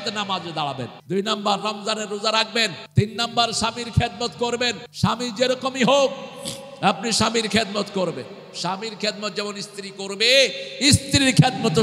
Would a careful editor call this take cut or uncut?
cut